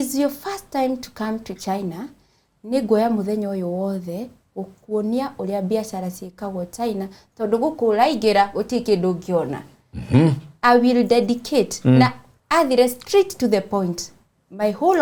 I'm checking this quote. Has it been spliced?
no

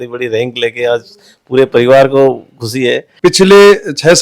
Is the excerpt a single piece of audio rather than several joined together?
no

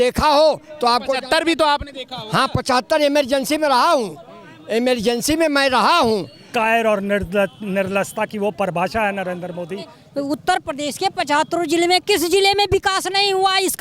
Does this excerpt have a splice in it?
yes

